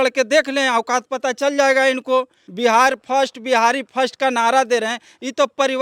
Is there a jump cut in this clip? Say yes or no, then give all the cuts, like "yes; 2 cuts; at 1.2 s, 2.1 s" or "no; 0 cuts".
yes; 1 cut; at 2.4 s